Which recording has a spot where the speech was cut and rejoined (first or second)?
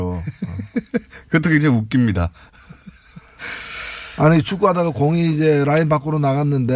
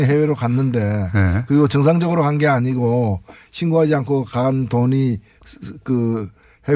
first